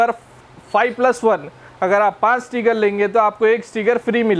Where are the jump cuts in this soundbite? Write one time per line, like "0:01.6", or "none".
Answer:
none